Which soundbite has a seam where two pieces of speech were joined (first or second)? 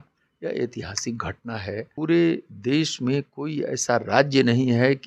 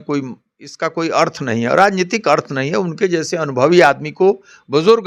first